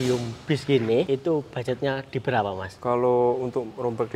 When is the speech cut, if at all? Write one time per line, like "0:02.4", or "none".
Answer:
0:01.1
0:02.7

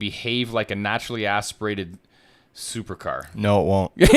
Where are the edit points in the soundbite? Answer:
none

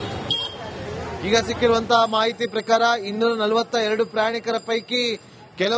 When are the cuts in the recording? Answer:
0:01.0

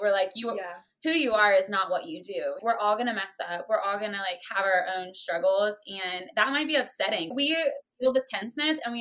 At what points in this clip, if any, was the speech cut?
0:02.6
0:07.3

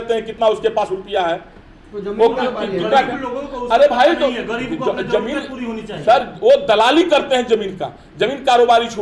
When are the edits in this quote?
none

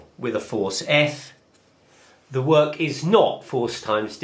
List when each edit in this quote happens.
none

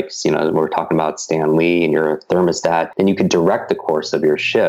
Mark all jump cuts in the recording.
0:02.9

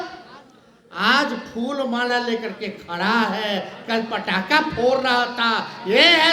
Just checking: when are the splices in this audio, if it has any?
none

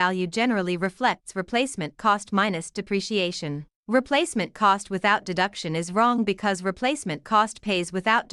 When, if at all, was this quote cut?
none

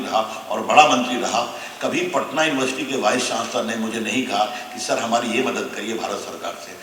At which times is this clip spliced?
none

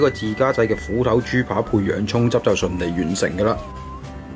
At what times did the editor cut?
none

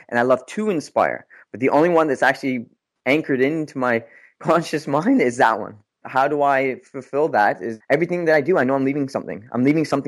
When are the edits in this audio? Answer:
0:06.0
0:07.7

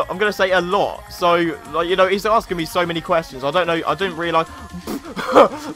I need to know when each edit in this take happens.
none

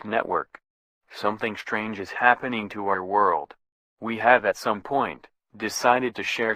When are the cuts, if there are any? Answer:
0:04.0

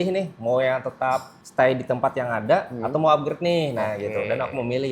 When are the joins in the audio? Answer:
0:01.4

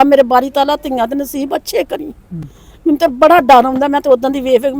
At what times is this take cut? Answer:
none

